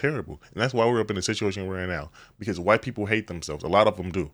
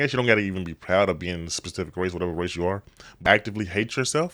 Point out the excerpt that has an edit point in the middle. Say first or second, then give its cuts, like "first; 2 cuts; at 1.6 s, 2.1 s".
second; 1 cut; at 3.2 s